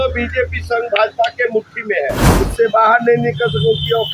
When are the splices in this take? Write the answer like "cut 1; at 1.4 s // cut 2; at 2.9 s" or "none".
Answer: cut 1; at 2.2 s